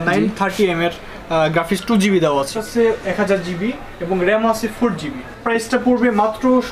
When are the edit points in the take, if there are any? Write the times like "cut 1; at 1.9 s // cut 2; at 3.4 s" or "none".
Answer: cut 1; at 2.6 s // cut 2; at 5.3 s